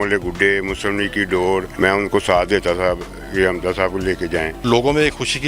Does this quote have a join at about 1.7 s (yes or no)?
yes